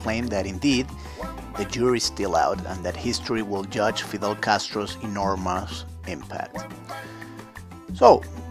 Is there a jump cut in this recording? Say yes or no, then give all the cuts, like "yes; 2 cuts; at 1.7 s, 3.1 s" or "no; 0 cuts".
yes; 1 cut; at 5.0 s